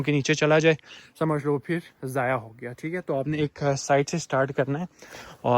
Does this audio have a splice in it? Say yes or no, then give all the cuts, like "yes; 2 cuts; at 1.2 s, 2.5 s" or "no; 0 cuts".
no; 0 cuts